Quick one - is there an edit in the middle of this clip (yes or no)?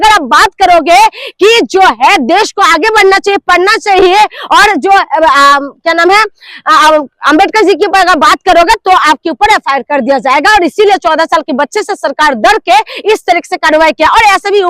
no